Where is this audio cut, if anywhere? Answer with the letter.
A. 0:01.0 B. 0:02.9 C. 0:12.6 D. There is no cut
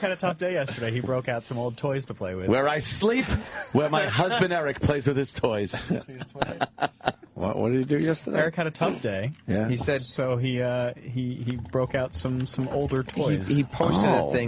D